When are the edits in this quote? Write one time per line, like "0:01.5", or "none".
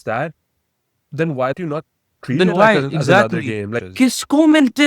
0:01.6
0:03.7